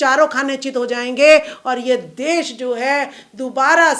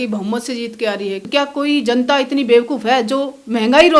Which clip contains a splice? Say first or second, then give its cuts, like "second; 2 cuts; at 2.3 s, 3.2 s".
second; 1 cut; at 1.2 s